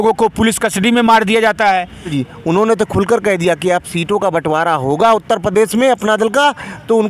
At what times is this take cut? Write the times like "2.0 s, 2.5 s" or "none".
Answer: 2.1 s

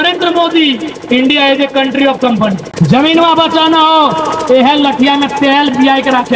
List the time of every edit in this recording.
2.7 s

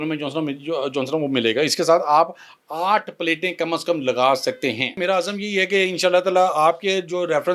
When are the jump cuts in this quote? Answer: 5.0 s

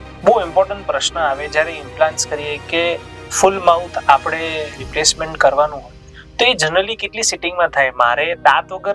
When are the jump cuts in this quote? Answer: none

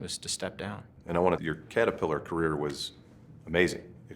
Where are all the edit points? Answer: 1.4 s

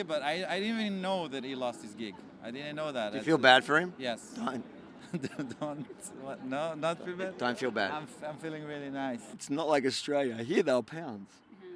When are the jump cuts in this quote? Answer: 9.3 s

